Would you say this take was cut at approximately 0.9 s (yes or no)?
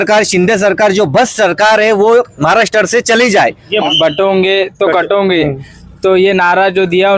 no